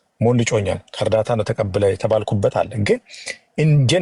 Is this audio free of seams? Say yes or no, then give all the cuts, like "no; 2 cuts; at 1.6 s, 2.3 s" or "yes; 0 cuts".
yes; 0 cuts